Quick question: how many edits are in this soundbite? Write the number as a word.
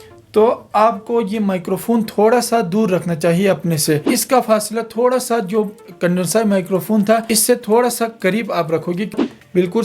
two